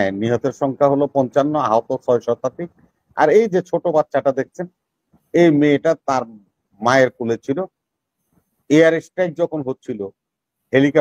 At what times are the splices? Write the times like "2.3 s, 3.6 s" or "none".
none